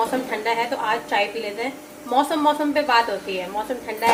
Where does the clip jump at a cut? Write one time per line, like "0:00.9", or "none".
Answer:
none